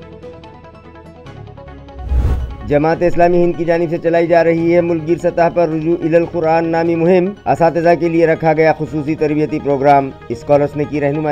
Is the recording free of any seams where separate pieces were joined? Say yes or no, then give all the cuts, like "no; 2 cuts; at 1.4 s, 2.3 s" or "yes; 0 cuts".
yes; 0 cuts